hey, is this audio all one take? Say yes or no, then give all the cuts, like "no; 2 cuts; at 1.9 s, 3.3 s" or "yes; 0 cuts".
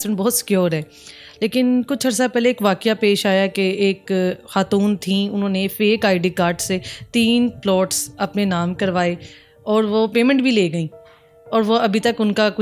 yes; 0 cuts